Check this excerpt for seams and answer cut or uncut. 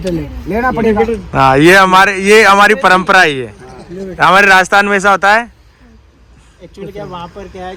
uncut